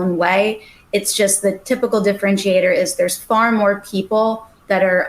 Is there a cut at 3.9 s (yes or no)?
no